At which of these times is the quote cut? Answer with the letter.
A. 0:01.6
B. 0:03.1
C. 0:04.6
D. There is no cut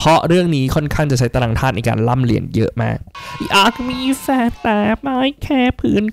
B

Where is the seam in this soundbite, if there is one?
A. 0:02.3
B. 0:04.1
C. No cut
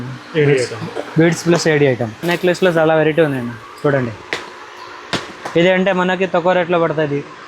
A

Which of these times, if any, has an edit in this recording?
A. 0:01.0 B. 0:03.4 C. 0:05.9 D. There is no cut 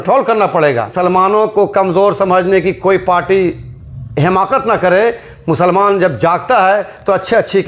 A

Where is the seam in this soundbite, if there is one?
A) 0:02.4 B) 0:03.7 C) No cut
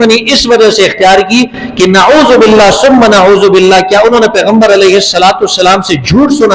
C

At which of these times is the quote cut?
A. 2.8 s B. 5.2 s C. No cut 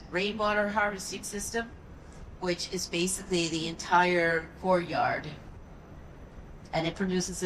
C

